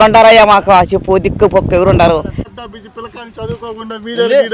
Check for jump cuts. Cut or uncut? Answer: cut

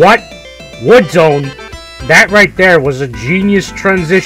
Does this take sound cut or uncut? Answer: uncut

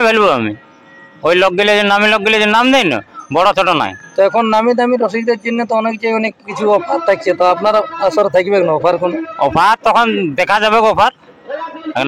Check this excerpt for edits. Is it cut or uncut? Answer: uncut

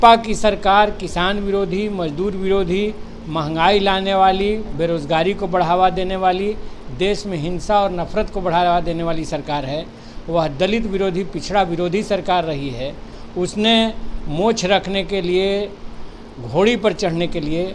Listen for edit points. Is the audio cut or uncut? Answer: uncut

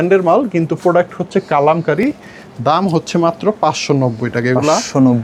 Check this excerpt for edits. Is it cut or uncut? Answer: uncut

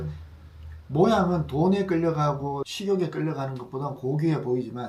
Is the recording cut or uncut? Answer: uncut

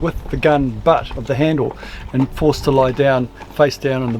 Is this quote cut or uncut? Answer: uncut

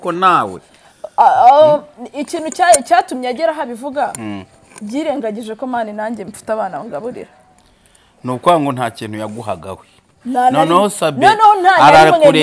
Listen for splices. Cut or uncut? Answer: uncut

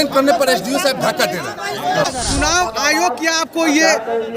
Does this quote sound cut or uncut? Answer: cut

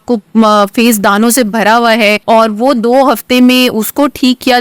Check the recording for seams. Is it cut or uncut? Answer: cut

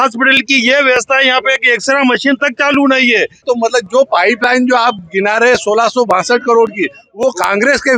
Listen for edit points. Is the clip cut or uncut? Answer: cut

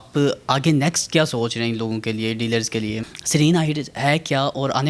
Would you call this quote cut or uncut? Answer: cut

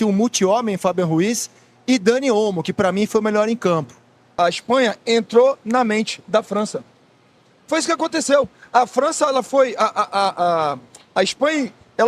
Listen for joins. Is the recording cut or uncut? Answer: cut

